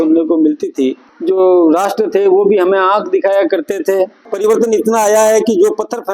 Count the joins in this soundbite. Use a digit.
2